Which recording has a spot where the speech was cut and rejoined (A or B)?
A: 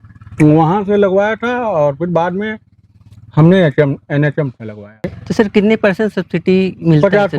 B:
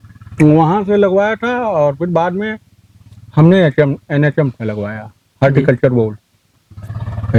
A